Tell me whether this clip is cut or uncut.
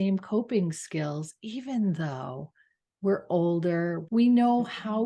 cut